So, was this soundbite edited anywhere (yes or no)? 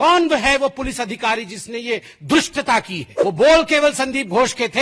yes